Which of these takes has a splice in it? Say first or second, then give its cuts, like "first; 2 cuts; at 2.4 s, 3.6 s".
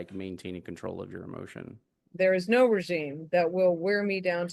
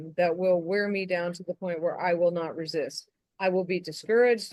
first; 1 cut; at 1.9 s